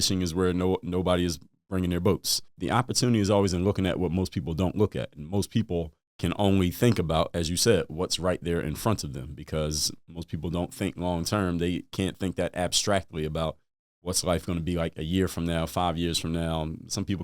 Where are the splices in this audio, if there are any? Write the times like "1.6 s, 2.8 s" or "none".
2.5 s